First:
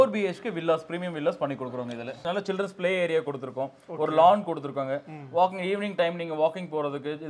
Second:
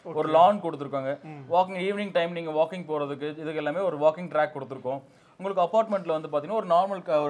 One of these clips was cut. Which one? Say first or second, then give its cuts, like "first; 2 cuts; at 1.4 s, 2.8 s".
first; 1 cut; at 2.2 s